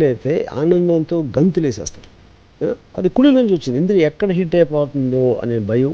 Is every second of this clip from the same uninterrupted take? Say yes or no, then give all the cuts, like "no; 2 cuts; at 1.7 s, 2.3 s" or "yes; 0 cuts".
yes; 0 cuts